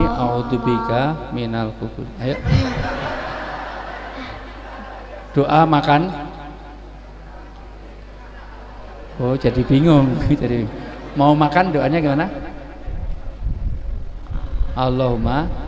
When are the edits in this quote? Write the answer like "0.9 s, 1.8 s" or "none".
none